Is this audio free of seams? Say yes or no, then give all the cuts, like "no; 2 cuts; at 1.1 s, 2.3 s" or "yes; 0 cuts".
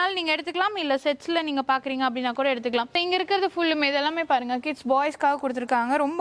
yes; 0 cuts